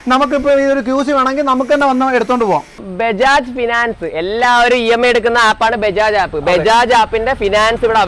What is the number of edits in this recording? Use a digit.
1